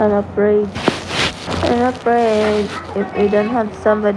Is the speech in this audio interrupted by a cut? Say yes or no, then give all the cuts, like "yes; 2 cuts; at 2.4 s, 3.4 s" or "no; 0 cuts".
yes; 1 cut; at 1.4 s